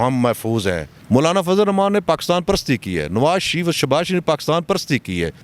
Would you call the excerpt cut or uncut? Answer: cut